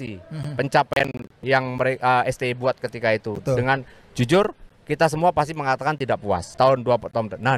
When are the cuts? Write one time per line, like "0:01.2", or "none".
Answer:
0:01.4
0:06.5